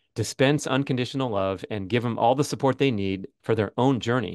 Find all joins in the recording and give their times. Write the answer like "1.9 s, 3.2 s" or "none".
3.3 s